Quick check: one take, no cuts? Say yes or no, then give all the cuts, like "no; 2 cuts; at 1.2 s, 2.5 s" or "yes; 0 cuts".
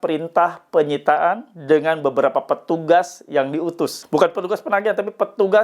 no; 1 cut; at 4.0 s